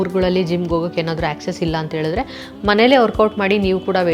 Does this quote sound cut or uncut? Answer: uncut